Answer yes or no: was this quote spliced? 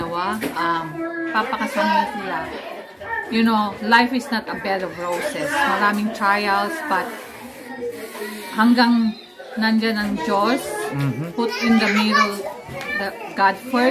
yes